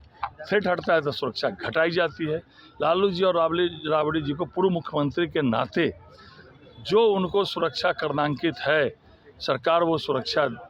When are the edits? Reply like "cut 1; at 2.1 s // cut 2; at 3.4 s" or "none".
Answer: none